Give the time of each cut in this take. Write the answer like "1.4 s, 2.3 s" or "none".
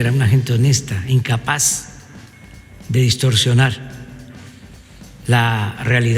none

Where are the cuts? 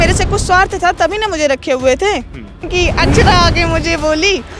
2.7 s

